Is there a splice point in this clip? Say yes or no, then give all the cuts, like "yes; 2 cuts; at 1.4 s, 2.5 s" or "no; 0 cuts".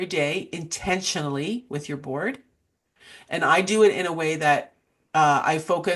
no; 0 cuts